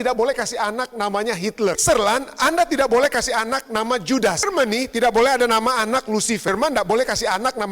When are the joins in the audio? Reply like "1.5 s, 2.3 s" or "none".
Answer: 1.8 s, 4.4 s, 6.5 s